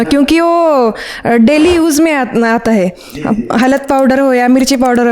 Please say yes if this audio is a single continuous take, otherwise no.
yes